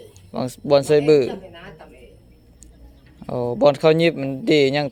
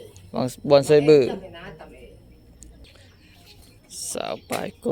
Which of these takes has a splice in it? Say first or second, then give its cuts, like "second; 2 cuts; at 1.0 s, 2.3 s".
second; 1 cut; at 2.9 s